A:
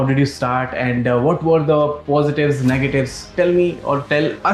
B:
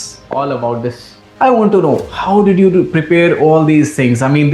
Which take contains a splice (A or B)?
B